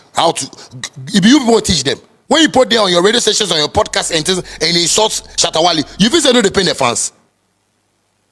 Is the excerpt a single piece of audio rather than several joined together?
yes; 0 cuts

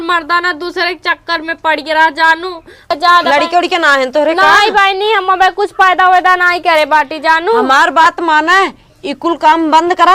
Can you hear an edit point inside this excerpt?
yes; 1 cut; at 2.9 s

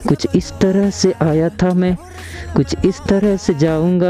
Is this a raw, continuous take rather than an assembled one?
yes; 0 cuts

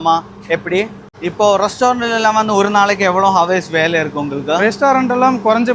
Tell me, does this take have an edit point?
yes; 1 cut; at 1.0 s

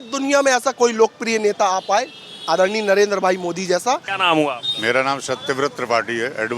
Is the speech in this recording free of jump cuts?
no; 1 cut; at 4.1 s

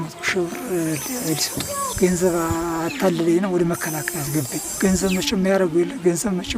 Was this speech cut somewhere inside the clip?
yes; 2 cuts; at 1.8 s, 4.8 s

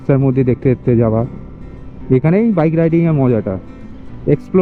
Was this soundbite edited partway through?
no; 0 cuts

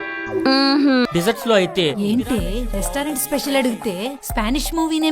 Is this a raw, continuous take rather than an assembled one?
no; 1 cut; at 1.1 s

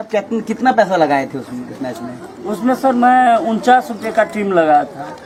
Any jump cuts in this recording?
no; 0 cuts

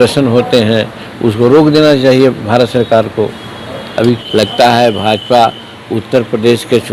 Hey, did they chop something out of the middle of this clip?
yes; 1 cut; at 4.2 s

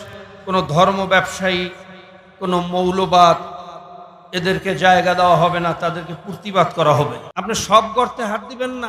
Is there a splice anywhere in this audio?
yes; 1 cut; at 7.3 s

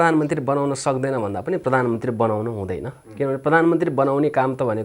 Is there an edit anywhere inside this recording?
no; 0 cuts

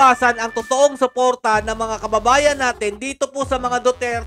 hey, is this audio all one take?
yes; 0 cuts

